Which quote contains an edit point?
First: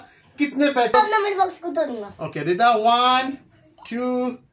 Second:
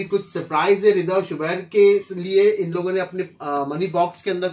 first; 1 cut; at 0.9 s

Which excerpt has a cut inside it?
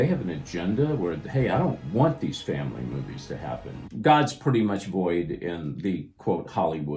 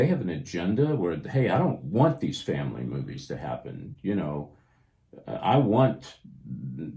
first; 1 cut; at 3.8 s

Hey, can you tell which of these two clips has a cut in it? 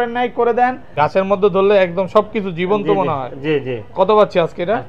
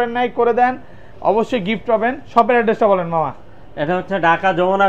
first; 1 cut; at 0.9 s

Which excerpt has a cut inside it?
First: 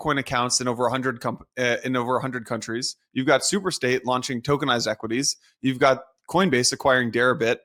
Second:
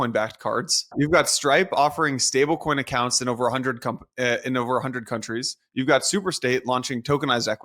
second; 1 cut; at 0.9 s

